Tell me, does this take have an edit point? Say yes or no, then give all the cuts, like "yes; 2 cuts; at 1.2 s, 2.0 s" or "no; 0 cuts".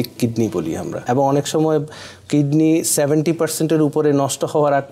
yes; 1 cut; at 1.0 s